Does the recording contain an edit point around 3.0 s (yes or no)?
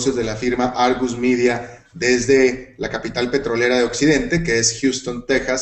yes